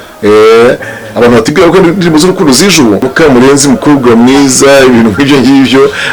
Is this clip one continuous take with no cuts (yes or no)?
no